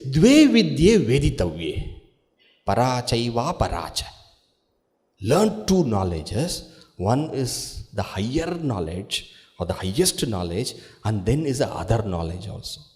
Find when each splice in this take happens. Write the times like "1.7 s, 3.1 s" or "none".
none